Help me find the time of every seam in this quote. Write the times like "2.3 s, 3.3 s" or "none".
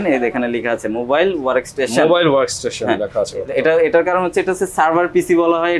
none